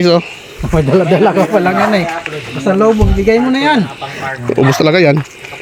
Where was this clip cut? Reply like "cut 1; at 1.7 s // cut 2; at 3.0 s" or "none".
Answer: none